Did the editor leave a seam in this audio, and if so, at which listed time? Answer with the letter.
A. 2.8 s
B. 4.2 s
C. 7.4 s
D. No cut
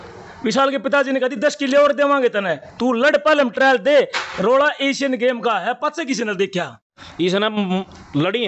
C